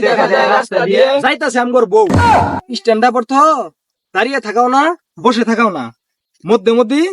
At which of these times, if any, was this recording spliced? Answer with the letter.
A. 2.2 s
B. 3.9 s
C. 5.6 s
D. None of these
A